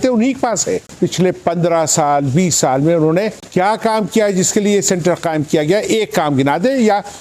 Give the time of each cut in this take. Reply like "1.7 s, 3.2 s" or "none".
0.9 s, 3.4 s